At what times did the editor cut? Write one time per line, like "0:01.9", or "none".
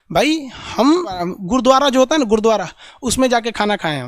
0:01.3

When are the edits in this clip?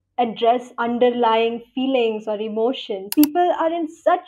0:03.1

